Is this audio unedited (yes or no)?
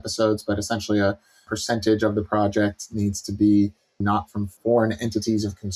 no